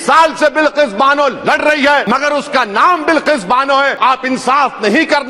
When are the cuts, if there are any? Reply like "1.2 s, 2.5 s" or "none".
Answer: 2.0 s, 3.9 s